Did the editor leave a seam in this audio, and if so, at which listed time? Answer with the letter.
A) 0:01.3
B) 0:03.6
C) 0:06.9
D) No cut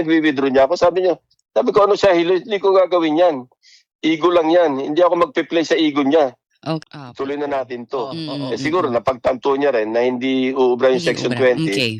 C